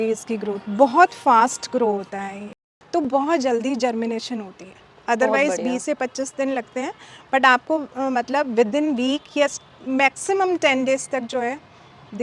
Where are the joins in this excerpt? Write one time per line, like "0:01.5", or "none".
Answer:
0:02.5